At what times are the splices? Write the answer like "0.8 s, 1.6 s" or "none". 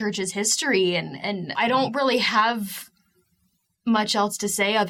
1.5 s